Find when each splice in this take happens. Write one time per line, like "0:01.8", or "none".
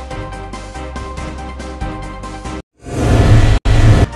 0:01.4